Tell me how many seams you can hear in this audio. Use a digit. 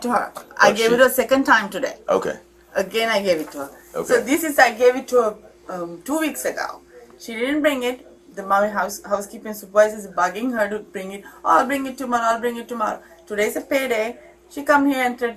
0